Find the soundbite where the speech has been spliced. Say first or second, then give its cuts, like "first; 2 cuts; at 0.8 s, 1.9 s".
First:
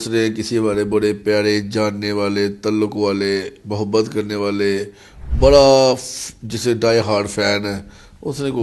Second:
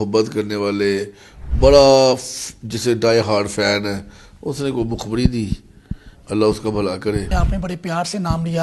second; 1 cut; at 7.3 s